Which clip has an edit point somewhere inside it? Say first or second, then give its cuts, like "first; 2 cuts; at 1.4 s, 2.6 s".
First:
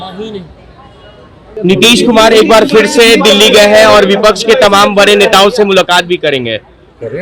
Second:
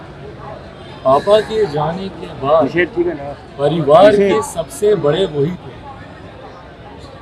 first; 1 cut; at 1.6 s